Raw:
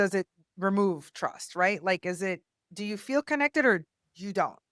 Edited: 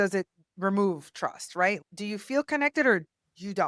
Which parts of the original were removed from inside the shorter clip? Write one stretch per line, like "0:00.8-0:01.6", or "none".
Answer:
0:01.8-0:02.6